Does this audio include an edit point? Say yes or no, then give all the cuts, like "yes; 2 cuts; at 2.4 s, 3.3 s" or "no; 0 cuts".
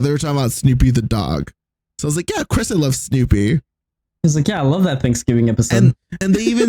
no; 0 cuts